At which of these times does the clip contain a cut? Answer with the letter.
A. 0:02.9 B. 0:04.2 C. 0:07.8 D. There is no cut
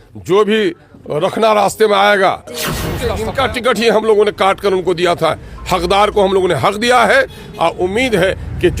A